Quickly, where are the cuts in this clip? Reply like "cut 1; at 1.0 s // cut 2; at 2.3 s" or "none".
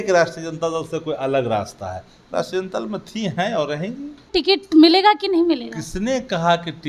cut 1; at 4.3 s